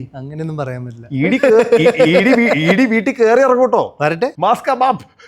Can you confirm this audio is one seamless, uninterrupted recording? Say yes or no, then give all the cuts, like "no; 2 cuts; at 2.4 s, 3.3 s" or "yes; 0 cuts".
no; 1 cut; at 4.3 s